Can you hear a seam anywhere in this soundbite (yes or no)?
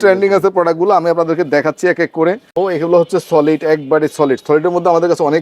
yes